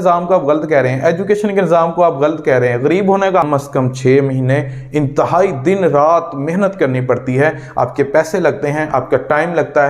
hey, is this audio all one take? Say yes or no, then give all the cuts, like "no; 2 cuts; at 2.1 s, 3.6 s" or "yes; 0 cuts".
no; 1 cut; at 3.4 s